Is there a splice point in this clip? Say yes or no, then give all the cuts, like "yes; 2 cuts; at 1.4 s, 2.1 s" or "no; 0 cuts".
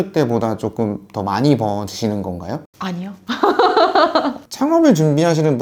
yes; 1 cut; at 4.4 s